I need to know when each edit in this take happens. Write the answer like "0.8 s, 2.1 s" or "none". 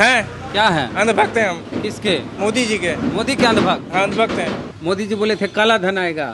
4.7 s